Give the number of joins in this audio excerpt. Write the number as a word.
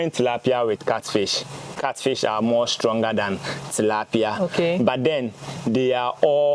one